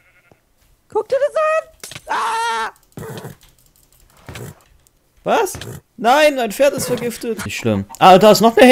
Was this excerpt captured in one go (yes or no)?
no